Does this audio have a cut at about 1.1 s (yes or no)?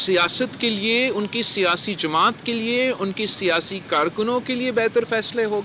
no